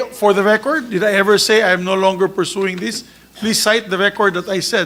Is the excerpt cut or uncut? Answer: uncut